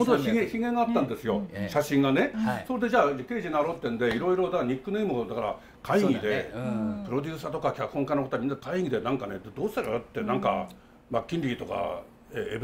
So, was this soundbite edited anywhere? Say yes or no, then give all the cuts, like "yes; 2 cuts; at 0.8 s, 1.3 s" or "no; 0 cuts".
no; 0 cuts